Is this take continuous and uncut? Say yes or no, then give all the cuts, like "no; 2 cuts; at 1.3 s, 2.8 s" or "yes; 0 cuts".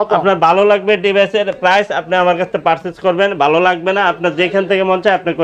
yes; 0 cuts